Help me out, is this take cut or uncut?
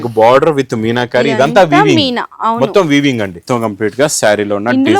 cut